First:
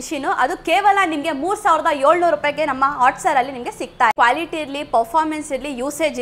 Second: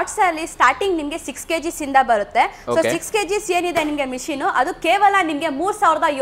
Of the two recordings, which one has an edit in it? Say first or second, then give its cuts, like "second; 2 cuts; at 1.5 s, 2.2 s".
first; 1 cut; at 4.1 s